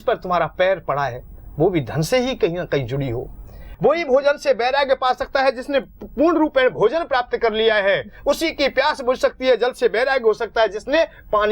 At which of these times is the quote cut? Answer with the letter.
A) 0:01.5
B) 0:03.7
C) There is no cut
B